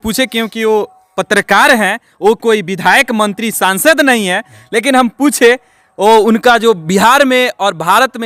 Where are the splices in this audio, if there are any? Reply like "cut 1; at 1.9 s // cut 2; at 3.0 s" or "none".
none